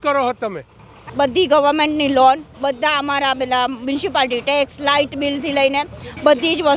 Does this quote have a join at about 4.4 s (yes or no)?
no